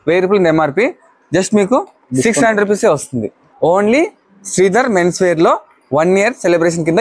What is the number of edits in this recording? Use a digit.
1